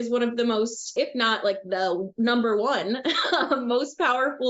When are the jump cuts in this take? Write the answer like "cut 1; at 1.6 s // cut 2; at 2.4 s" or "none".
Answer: cut 1; at 0.9 s